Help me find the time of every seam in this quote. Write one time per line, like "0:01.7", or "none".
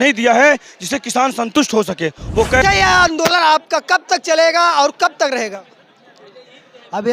0:02.6